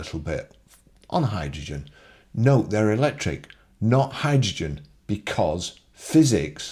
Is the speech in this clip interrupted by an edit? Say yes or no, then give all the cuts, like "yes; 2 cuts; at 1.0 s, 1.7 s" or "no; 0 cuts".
no; 0 cuts